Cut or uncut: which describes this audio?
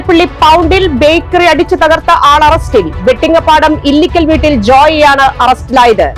uncut